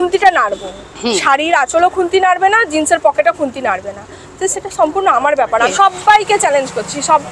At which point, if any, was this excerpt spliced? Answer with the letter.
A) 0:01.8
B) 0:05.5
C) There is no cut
B